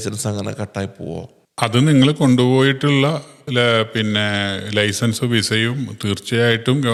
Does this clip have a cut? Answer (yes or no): no